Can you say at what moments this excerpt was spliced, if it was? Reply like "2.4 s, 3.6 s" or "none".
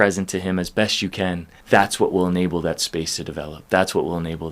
1.5 s